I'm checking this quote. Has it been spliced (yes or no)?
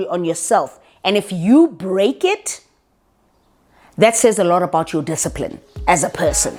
no